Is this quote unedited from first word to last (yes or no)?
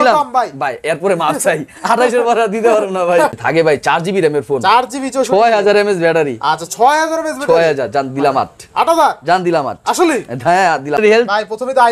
no